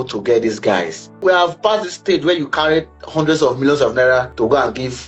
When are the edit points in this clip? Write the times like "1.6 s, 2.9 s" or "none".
1.2 s, 4.3 s

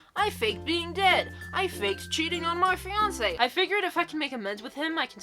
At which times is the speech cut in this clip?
3.4 s

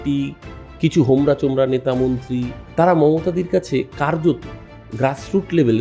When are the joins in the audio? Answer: 2.6 s

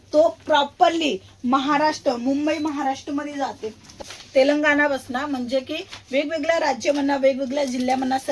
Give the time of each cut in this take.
4.0 s

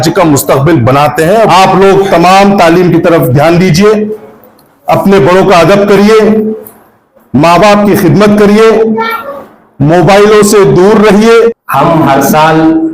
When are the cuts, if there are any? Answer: 1.5 s, 11.6 s

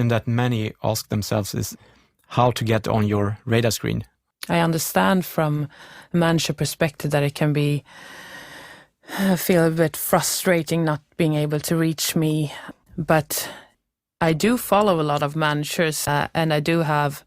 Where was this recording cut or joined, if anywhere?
1.7 s, 4.1 s, 12.6 s, 16.1 s

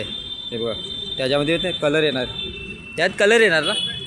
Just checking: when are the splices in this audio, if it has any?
none

